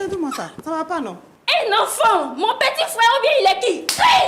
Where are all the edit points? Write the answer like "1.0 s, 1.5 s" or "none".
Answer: 1.3 s